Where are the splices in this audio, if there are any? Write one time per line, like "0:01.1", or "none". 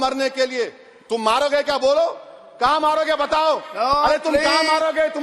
none